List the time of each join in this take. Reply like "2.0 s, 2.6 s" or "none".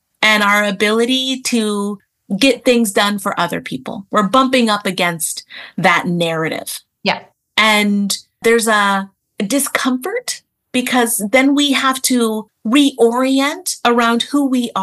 8.4 s, 9.2 s, 12.5 s